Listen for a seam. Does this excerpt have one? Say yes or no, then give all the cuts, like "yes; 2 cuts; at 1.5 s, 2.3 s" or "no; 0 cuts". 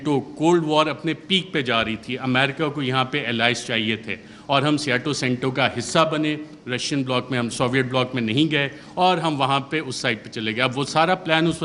no; 0 cuts